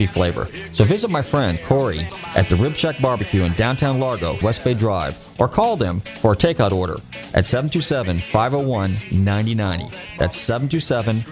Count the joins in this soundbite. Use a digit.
2